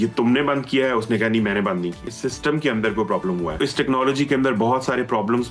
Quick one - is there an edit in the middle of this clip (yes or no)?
yes